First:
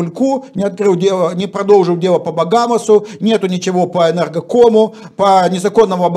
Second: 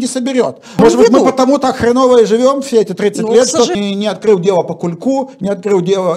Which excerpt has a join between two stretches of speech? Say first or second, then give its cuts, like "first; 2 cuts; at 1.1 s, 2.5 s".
second; 2 cuts; at 0.8 s, 3.7 s